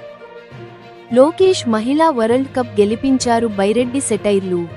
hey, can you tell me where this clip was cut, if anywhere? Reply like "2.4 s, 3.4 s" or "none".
1.0 s